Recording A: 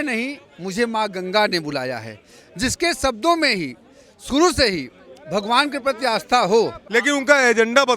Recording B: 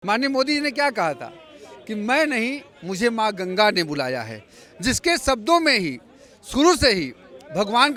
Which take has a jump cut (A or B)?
A